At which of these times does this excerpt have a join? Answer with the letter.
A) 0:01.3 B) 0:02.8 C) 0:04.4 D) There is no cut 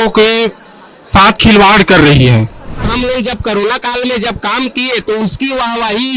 B